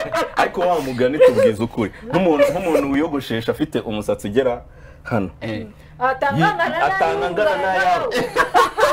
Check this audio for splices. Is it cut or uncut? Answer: uncut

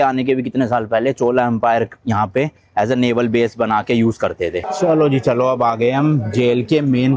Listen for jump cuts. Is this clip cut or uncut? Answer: cut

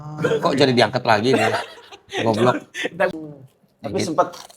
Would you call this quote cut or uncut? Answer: cut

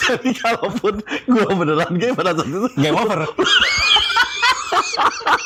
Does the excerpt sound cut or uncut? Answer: uncut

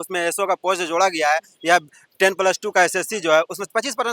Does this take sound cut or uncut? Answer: uncut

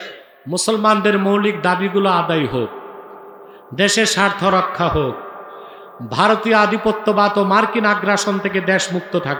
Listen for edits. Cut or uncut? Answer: uncut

